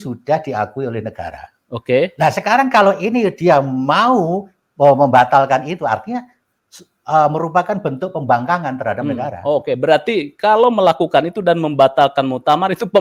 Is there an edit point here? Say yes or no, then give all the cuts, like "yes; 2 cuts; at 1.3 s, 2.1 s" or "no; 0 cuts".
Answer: no; 0 cuts